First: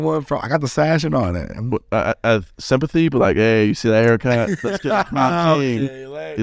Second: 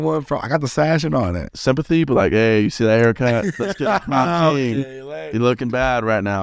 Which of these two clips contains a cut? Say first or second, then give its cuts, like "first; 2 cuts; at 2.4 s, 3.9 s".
second; 1 cut; at 1.5 s